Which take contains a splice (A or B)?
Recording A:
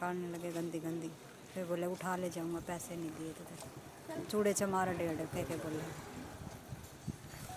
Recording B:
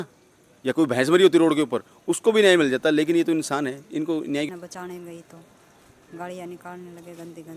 B